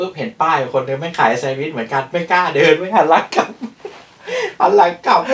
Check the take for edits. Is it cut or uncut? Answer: uncut